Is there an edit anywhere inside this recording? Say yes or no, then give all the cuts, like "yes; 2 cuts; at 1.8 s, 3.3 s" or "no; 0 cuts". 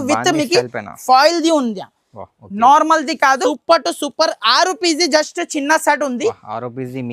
yes; 1 cut; at 3.5 s